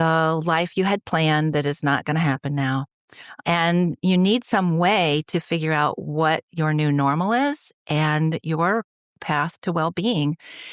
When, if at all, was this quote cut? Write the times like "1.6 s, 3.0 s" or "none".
3.4 s, 9.2 s